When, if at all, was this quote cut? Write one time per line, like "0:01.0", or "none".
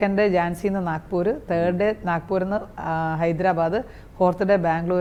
none